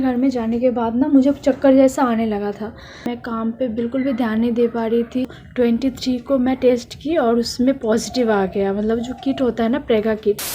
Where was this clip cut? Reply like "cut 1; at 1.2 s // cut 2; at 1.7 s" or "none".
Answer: cut 1; at 3.1 s // cut 2; at 5.4 s